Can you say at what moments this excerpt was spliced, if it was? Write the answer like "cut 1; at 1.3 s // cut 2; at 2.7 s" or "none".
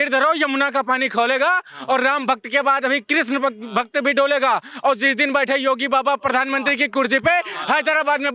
none